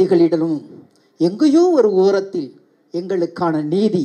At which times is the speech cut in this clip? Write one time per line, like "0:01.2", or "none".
none